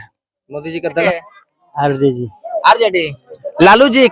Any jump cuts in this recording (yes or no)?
yes